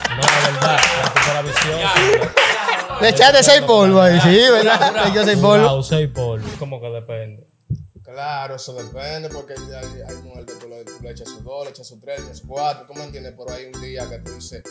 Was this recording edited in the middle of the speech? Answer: yes; 1 cut; at 6.5 s

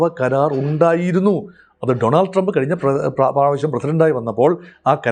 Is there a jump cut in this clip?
no; 0 cuts

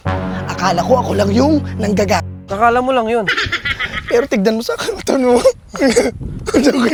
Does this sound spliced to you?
no; 0 cuts

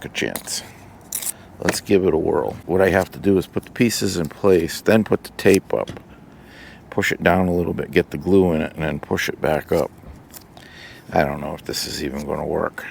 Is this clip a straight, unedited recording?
yes; 0 cuts

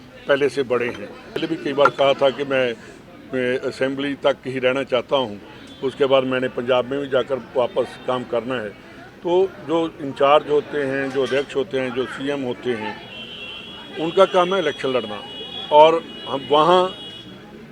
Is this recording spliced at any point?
yes; 1 cut; at 1.4 s

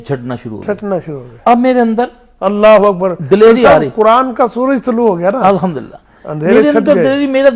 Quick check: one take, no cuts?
yes; 0 cuts

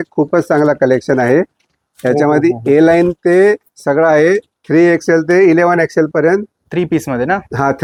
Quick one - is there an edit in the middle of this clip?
no; 0 cuts

